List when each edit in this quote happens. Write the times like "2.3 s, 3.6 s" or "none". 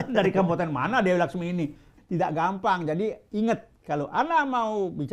2.0 s